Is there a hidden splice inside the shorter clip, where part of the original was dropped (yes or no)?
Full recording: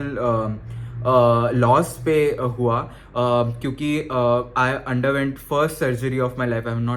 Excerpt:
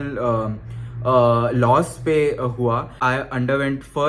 yes